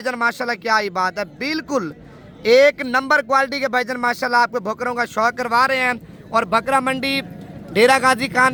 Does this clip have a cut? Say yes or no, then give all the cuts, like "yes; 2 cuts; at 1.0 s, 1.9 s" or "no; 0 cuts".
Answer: no; 0 cuts